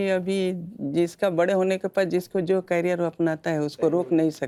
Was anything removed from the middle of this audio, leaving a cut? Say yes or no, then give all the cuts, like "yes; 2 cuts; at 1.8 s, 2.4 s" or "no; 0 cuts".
no; 0 cuts